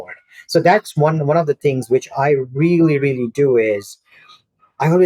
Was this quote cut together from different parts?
no; 0 cuts

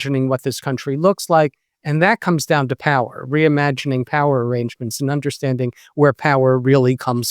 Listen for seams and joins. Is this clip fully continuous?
yes; 0 cuts

